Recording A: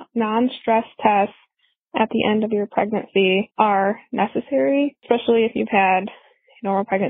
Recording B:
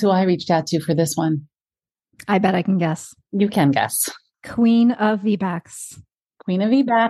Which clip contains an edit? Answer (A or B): A